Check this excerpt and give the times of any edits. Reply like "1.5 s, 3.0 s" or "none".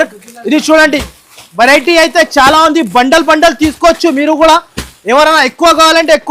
none